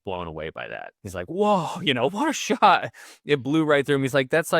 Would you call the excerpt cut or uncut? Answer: cut